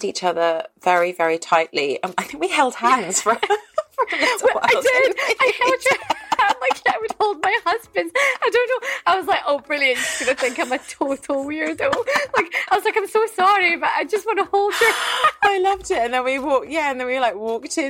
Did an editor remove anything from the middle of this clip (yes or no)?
no